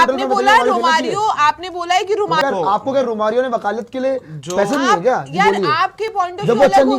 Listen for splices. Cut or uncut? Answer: cut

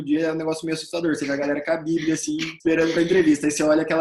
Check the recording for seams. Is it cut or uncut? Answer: cut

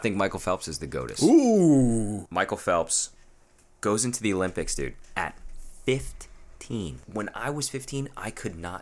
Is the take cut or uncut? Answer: cut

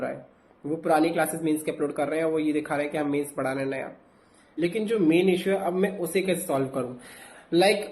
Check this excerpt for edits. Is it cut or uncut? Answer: cut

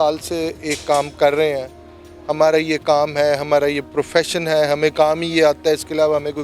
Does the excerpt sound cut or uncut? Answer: uncut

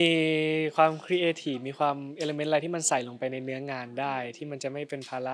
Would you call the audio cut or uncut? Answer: uncut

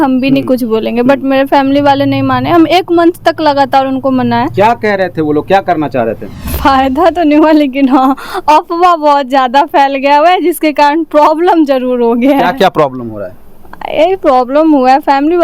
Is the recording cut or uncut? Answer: cut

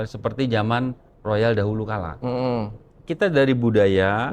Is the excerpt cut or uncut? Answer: cut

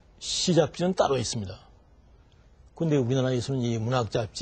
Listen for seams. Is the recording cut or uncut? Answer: uncut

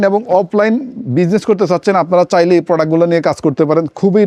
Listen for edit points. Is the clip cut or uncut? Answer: uncut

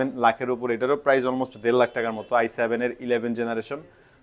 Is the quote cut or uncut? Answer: uncut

